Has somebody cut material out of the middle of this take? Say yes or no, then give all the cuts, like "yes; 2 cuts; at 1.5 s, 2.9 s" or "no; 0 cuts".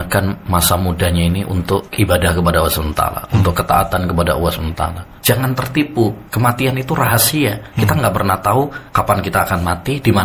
yes; 5 cuts; at 1.9 s, 5.1 s, 6.2 s, 7.6 s, 8.8 s